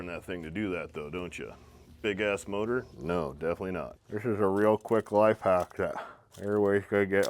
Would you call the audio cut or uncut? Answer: cut